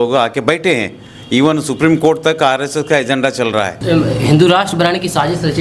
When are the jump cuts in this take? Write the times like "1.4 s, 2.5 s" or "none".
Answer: 3.8 s